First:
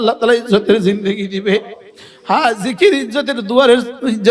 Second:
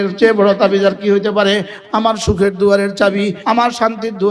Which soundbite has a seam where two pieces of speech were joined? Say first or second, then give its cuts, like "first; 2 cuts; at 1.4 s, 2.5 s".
second; 2 cuts; at 1.8 s, 3.4 s